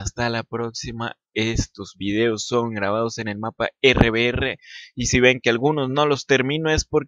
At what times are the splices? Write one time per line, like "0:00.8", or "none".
none